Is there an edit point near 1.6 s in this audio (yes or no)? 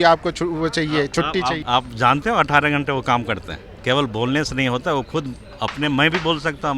yes